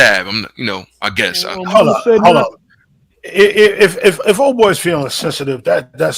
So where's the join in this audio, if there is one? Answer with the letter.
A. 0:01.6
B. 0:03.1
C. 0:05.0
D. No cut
A